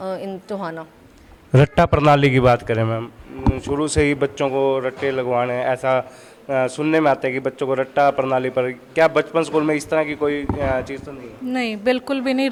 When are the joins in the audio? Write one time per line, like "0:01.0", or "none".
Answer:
none

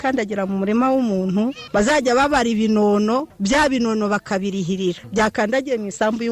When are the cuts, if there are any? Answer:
0:01.6
0:03.3
0:05.0

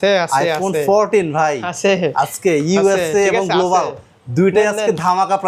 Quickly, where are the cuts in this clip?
none

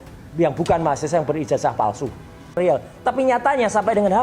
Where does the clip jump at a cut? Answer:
0:02.5

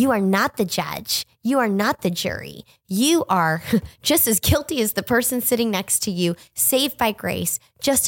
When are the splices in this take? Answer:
none

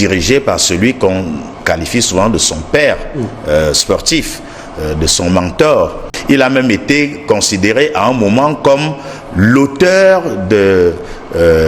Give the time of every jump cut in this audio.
0:06.1

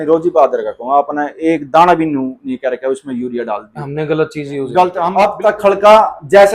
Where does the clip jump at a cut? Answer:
0:05.1

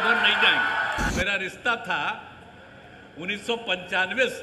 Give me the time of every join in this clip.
0:01.1

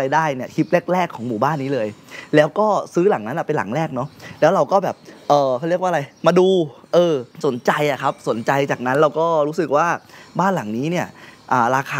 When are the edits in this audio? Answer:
none

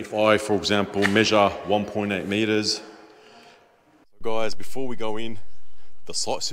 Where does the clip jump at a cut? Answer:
0:04.0

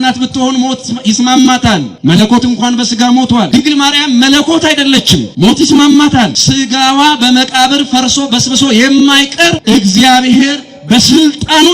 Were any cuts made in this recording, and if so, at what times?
0:01.9
0:03.5
0:05.3
0:06.4
0:09.6

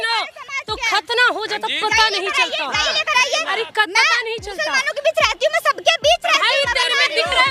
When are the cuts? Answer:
none

